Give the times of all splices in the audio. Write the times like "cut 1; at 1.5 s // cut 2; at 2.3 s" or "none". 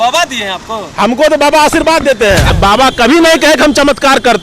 cut 1; at 2.5 s